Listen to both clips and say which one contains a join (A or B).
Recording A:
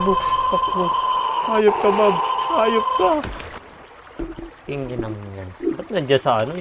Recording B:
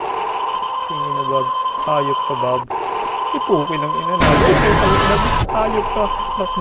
A